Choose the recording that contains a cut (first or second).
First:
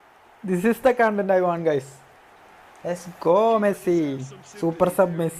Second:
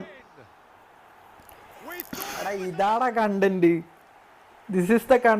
second